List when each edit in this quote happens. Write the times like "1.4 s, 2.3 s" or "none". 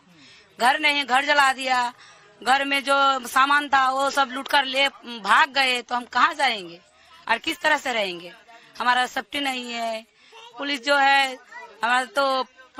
none